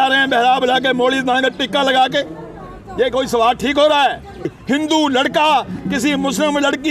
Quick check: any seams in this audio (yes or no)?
yes